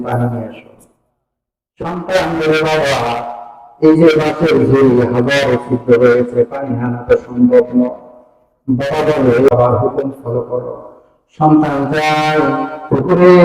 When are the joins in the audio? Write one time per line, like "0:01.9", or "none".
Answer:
0:09.5